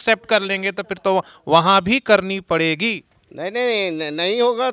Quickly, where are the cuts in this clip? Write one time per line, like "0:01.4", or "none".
none